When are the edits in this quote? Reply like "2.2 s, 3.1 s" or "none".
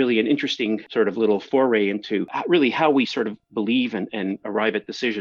0.9 s, 2.3 s